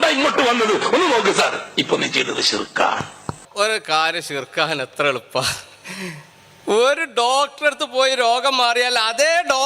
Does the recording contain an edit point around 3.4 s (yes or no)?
yes